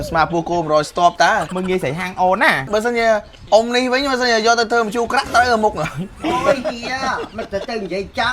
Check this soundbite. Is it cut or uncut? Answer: cut